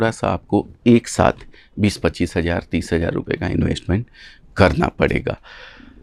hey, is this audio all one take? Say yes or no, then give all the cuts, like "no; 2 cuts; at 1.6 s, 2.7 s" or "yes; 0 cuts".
yes; 0 cuts